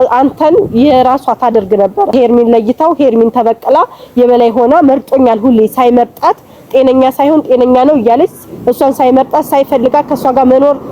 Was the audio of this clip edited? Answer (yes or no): yes